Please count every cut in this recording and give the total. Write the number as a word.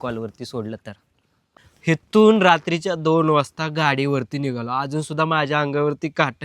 one